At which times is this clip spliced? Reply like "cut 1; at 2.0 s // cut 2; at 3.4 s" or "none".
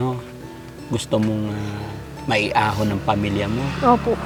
none